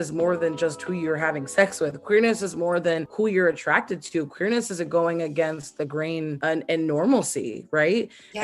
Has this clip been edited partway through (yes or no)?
yes